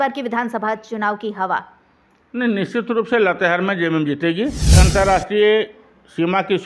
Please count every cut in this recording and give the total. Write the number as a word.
one